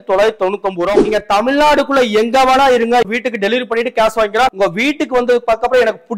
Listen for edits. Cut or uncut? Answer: cut